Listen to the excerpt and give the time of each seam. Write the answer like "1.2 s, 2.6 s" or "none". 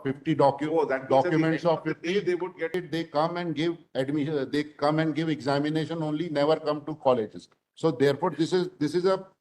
2.7 s